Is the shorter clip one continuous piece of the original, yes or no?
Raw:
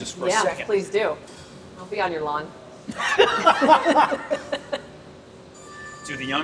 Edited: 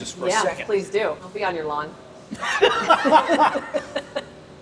no